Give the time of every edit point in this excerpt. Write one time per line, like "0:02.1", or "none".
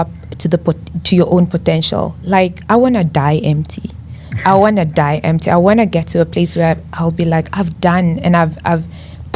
none